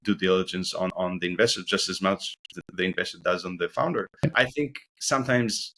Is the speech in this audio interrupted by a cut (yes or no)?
yes